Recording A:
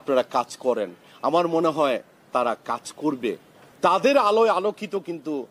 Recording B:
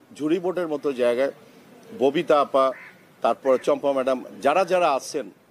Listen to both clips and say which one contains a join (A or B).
A